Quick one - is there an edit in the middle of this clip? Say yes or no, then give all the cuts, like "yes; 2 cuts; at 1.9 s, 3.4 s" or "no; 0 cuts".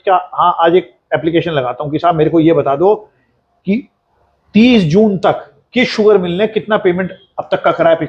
no; 0 cuts